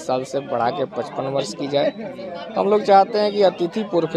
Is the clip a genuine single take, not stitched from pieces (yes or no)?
yes